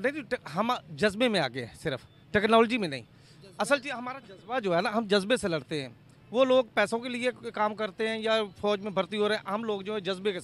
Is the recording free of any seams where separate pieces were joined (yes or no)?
yes